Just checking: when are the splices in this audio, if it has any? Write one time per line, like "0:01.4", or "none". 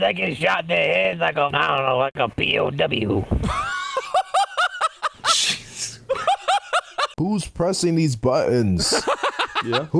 0:01.5
0:07.1